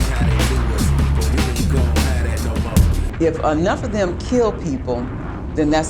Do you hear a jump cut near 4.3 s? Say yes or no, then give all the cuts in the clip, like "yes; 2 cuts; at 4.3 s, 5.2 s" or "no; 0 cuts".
no; 1 cut; at 3.0 s